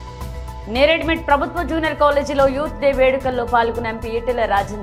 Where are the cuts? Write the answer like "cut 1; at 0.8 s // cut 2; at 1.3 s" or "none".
none